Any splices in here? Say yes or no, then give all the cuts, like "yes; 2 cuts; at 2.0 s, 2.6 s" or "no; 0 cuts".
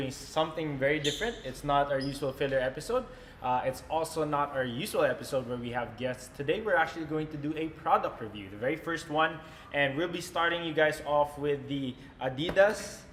no; 0 cuts